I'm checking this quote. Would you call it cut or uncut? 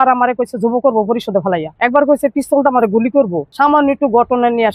cut